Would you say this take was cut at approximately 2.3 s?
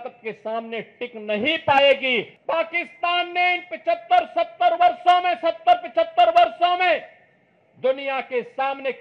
yes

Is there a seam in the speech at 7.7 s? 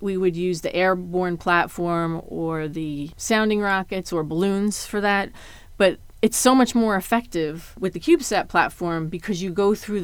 yes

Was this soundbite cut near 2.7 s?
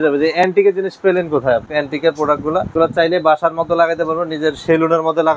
yes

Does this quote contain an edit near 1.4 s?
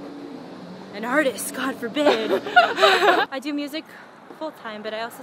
no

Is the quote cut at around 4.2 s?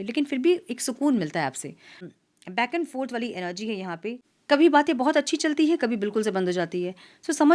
yes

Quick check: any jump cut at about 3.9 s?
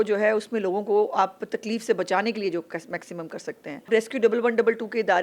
yes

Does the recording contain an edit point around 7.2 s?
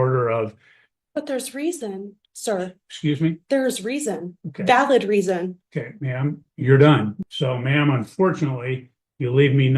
yes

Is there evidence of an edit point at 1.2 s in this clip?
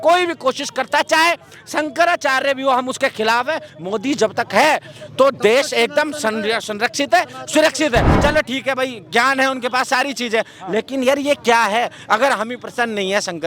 no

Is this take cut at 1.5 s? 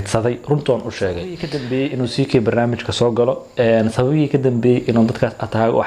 yes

